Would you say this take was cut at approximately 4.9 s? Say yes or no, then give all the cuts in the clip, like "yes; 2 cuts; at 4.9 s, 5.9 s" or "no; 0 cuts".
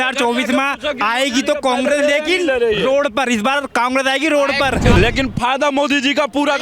yes; 1 cut; at 4.9 s